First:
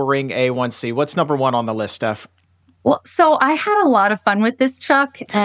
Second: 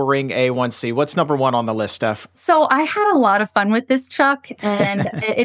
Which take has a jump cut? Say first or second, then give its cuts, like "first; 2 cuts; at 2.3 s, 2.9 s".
second; 1 cut; at 2.4 s